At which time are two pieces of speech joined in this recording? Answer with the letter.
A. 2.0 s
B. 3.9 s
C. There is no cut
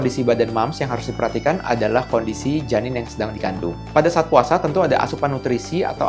C